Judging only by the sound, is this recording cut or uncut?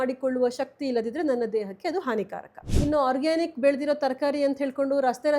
cut